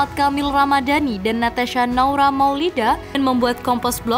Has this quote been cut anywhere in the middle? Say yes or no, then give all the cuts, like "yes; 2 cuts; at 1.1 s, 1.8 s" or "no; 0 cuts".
yes; 1 cut; at 3.2 s